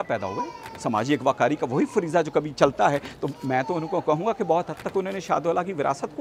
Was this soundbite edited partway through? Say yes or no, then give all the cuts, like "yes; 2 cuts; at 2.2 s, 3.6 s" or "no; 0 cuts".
no; 0 cuts